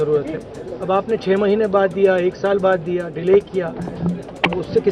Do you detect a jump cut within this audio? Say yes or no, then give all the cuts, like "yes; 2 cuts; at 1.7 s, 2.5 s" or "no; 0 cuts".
no; 0 cuts